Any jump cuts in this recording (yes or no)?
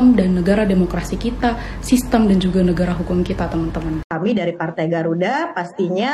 yes